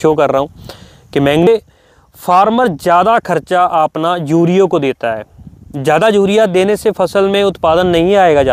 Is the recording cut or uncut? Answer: cut